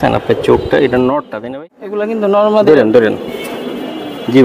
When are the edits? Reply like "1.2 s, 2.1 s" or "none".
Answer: 1.4 s